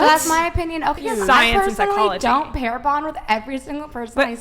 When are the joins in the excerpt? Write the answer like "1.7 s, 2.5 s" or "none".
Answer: 1.0 s